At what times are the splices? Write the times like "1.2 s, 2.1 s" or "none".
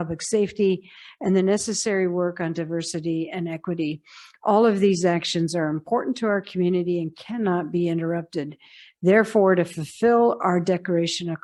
none